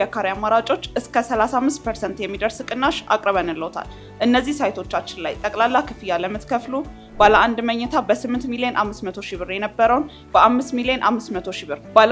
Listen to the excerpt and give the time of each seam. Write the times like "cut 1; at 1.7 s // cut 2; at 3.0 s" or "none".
none